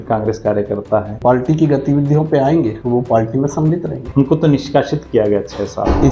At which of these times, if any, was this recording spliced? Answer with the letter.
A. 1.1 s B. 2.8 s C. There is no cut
A